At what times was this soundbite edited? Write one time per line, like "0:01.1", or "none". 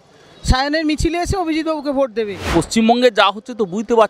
0:02.5